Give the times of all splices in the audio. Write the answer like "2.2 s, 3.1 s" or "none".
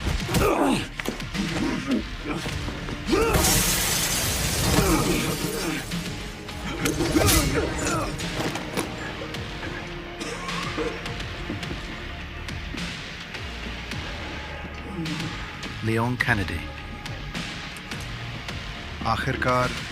none